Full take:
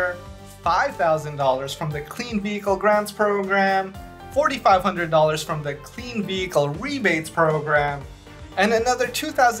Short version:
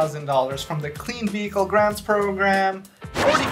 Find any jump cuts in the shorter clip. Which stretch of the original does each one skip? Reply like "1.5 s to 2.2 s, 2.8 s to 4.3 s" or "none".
none